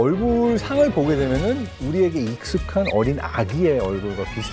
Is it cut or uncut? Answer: uncut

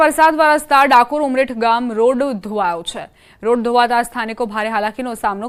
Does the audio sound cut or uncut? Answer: uncut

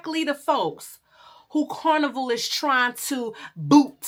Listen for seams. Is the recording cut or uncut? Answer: uncut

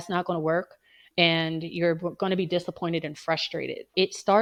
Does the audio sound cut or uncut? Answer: uncut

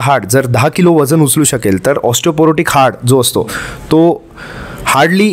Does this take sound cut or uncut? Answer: uncut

